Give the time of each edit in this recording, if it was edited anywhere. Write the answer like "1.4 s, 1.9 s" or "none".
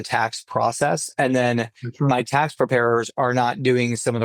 none